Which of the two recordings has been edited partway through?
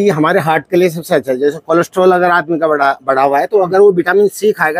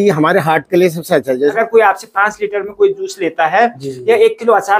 second; 1 cut; at 1.5 s

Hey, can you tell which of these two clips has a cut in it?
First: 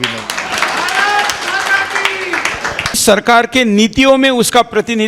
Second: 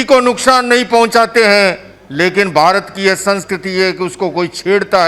first; 1 cut; at 3.0 s

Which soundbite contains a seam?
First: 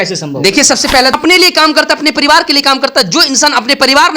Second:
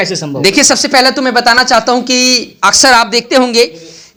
first; 1 cut; at 1.1 s

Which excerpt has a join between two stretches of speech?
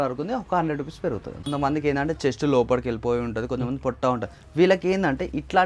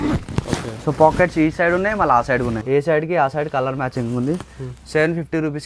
second; 1 cut; at 2.6 s

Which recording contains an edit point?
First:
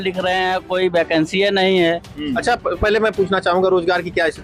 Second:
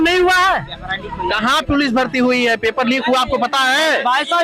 first; 1 cut; at 2.3 s

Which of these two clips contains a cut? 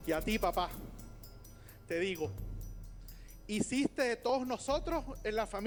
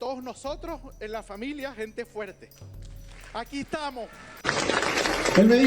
second; 1 cut; at 4.5 s

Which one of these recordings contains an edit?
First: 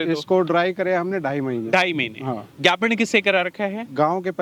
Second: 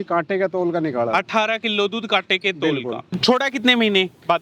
second; 1 cut; at 3.1 s

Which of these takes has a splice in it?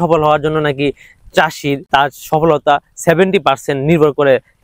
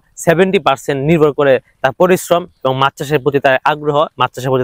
first; 1 cut; at 1.9 s

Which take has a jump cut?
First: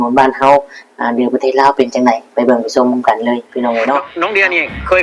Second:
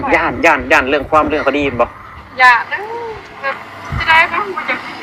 first; 1 cut; at 4.1 s

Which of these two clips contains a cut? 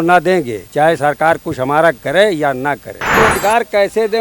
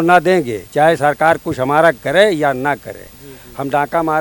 first; 1 cut; at 3.2 s

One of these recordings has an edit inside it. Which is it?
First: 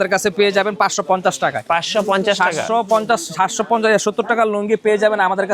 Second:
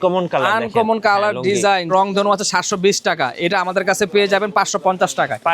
second; 1 cut; at 1.9 s

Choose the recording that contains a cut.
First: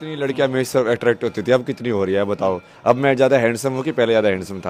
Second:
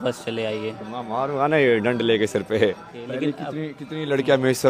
second; 1 cut; at 2.9 s

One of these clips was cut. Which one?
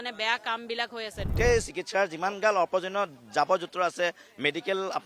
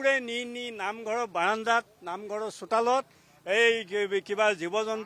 first; 1 cut; at 1.3 s

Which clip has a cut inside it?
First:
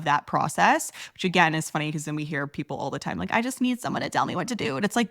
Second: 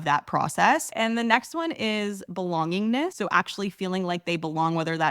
second; 2 cuts; at 0.9 s, 3.1 s

